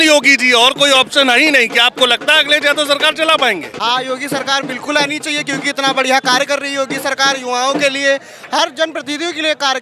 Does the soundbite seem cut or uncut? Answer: cut